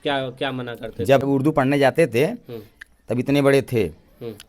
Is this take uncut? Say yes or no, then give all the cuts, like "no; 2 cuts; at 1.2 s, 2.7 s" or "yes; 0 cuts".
no; 1 cut; at 1.2 s